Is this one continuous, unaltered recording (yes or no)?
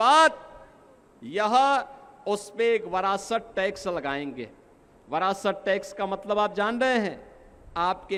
yes